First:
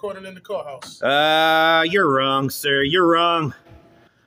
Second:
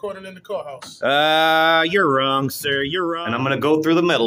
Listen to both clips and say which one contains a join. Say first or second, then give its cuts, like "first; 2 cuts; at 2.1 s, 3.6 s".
second; 1 cut; at 3.1 s